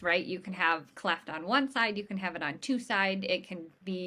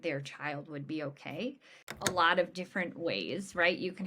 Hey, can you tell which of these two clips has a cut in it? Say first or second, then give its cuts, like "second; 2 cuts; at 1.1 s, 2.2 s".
second; 1 cut; at 2.1 s